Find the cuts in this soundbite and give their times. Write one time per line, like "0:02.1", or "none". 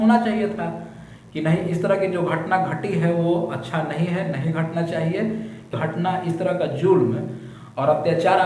0:05.7